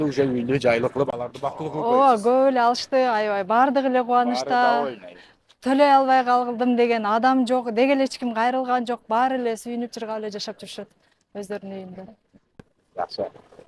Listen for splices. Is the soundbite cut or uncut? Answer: uncut